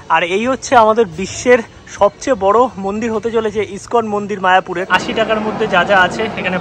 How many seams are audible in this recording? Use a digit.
1